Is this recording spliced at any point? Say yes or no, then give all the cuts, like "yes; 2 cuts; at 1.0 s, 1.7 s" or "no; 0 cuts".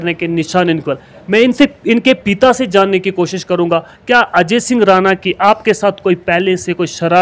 no; 0 cuts